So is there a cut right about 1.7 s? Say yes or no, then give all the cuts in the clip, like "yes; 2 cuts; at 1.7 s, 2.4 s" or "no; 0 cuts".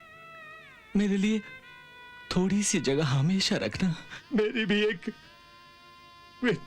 no; 1 cut; at 4.1 s